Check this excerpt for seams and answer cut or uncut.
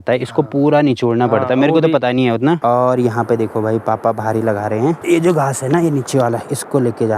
cut